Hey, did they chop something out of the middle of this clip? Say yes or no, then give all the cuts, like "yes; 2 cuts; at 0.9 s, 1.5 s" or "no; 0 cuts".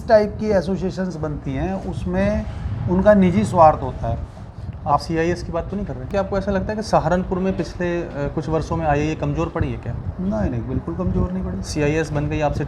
yes; 1 cut; at 6.1 s